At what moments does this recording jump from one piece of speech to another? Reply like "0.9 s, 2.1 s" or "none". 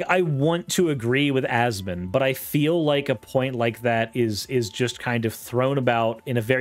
none